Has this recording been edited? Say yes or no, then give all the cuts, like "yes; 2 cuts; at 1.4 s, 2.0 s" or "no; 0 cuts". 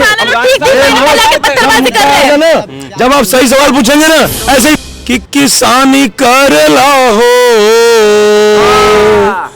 yes; 1 cut; at 4.8 s